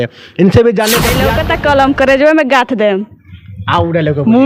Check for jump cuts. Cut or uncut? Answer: cut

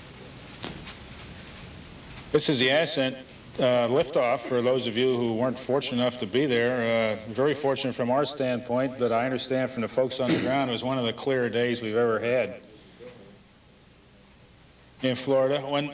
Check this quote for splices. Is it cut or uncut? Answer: uncut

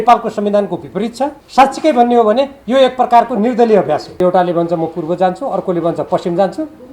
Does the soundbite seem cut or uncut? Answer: cut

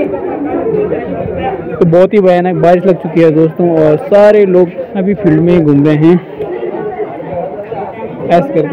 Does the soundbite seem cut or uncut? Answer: uncut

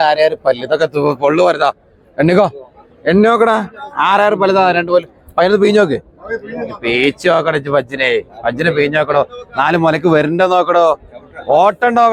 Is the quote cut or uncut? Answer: uncut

